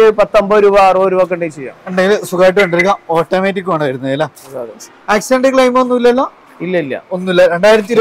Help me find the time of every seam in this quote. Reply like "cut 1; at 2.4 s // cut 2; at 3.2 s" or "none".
none

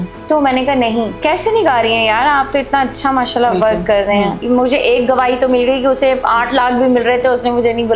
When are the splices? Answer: cut 1; at 1.2 s // cut 2; at 4.4 s

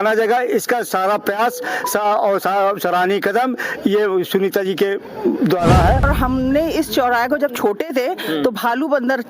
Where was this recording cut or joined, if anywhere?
cut 1; at 6.0 s

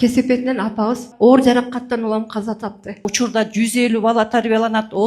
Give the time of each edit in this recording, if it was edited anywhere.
cut 1; at 1.1 s // cut 2; at 3.1 s

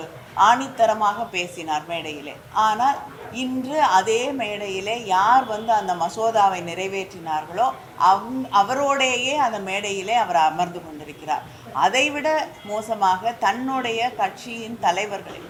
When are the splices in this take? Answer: none

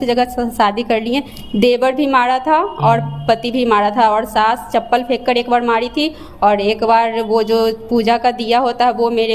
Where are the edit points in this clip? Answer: cut 1; at 1.4 s

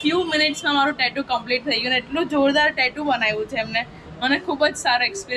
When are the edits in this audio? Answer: none

